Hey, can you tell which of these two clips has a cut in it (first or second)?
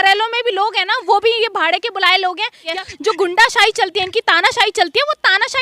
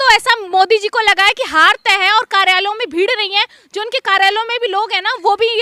first